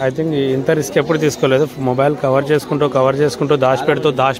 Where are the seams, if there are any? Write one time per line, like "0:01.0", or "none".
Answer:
none